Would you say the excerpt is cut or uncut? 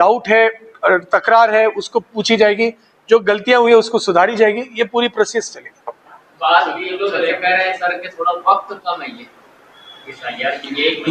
uncut